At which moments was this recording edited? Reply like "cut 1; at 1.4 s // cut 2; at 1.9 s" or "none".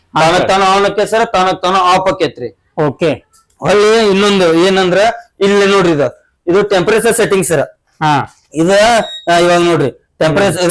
none